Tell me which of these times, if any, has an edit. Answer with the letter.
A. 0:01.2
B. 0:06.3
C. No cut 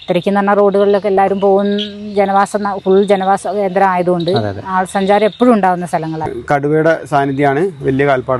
B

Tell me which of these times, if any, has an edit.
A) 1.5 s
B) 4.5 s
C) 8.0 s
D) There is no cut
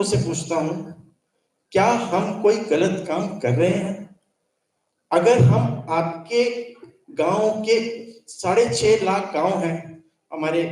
D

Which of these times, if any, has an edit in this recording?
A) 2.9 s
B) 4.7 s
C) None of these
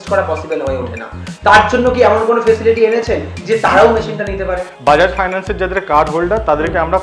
B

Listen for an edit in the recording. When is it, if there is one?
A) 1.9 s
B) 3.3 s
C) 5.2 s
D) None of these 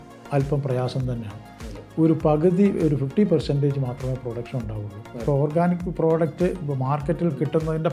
C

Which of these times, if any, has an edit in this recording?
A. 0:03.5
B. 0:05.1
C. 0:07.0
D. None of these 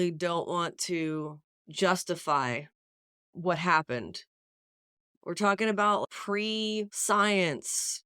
C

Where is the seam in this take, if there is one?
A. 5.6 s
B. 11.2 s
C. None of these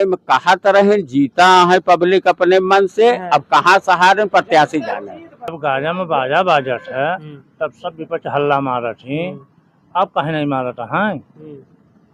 A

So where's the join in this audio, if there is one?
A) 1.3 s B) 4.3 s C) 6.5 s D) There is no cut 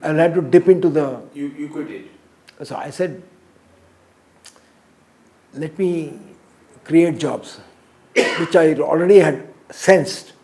D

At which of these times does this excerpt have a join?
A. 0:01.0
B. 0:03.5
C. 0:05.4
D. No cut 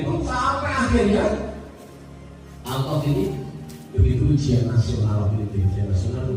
D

